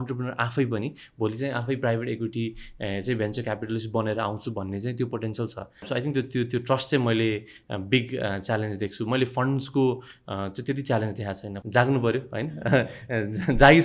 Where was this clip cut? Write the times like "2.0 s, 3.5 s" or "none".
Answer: 5.9 s, 11.5 s